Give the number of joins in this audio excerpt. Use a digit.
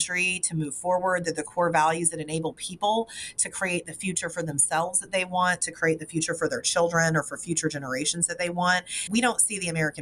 0